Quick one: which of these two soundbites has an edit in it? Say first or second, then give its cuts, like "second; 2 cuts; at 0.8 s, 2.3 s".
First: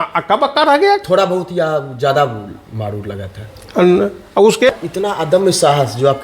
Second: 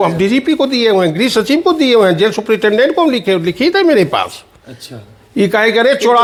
first; 1 cut; at 4.7 s